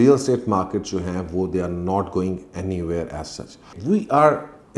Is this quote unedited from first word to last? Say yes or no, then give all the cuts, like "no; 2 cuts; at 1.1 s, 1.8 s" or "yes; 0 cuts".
no; 1 cut; at 3.7 s